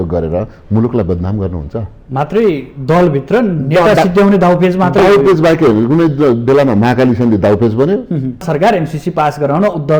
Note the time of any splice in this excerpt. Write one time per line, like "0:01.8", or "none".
0:08.4